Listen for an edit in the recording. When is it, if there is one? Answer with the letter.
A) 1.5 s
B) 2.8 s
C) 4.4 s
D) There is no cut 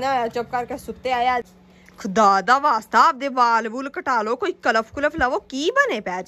A